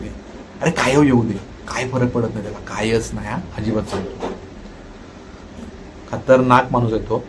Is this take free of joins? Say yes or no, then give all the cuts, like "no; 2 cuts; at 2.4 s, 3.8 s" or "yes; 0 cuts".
yes; 0 cuts